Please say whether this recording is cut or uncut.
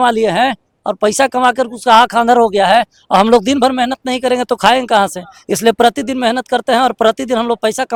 uncut